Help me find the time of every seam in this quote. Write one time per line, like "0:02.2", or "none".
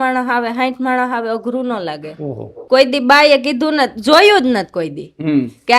0:02.5